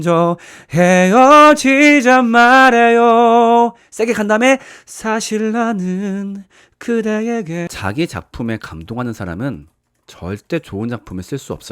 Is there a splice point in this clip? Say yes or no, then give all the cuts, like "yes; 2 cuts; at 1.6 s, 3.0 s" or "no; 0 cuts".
yes; 1 cut; at 7.7 s